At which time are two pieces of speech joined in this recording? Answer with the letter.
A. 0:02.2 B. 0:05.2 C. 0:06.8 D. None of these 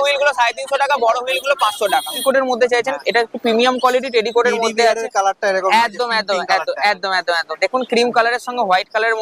A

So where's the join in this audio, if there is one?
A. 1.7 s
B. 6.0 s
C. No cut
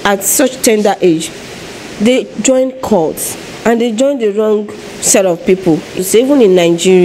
B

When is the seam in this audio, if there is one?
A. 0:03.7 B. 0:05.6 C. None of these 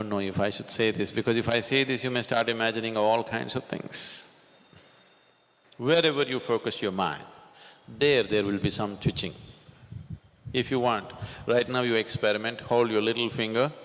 B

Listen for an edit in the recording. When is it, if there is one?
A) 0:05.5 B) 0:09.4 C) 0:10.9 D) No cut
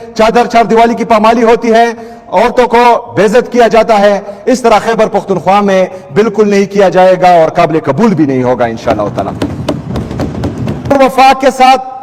C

